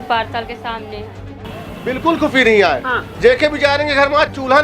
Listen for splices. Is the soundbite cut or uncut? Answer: cut